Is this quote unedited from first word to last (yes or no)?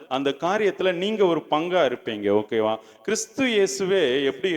no